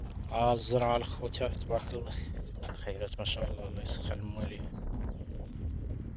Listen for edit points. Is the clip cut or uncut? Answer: uncut